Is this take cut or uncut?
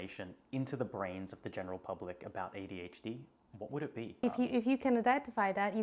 cut